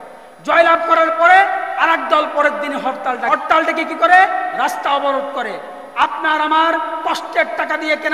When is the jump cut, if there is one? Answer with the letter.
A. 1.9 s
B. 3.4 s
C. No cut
B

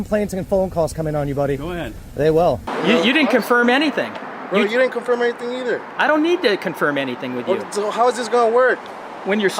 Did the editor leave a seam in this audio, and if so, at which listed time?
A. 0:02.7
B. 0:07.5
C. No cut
A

